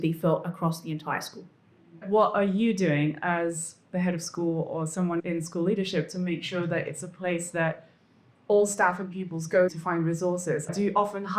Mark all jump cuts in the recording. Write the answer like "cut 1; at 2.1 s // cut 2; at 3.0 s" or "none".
cut 1; at 2.0 s